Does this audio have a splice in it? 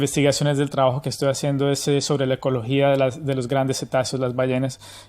yes; 1 cut; at 3.5 s

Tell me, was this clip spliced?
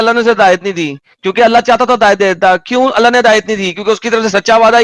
no; 0 cuts

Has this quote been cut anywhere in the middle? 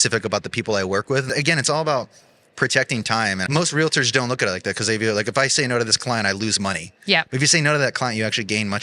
yes; 2 cuts; at 1.3 s, 3.4 s

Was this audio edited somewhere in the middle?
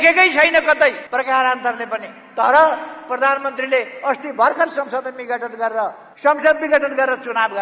no; 0 cuts

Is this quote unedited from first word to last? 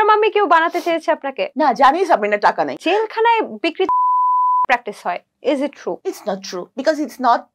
no; 3 cuts; at 1.4 s, 2.8 s, 6.5 s

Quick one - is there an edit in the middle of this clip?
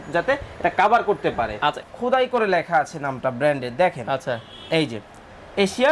yes; 1 cut; at 1.8 s

